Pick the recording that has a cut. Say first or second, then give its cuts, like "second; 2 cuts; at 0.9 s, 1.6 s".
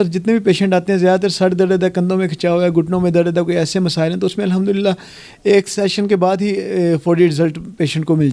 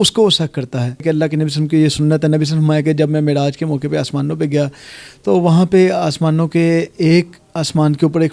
second; 1 cut; at 1.0 s